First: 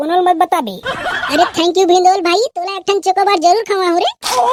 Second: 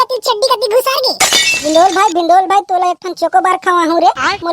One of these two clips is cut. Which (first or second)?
second